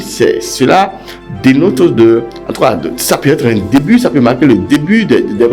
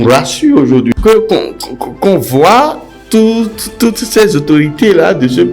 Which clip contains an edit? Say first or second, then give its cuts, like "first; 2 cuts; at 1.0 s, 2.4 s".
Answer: second; 1 cut; at 0.9 s